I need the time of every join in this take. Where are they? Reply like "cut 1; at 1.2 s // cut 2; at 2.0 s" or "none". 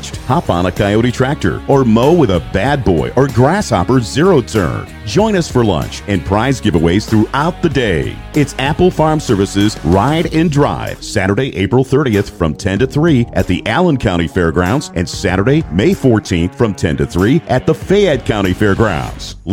none